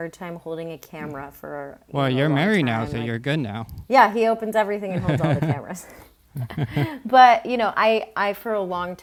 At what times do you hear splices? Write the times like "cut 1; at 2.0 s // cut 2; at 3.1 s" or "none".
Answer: none